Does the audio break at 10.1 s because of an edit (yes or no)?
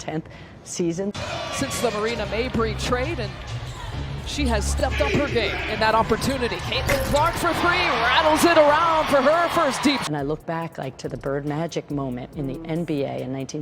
yes